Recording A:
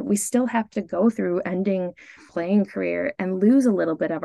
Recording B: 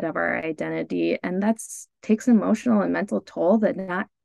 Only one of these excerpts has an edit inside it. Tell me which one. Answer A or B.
A